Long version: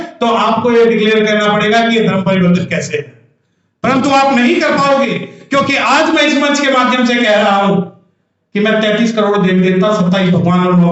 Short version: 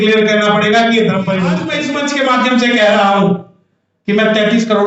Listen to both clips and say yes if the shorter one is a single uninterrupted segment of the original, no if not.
no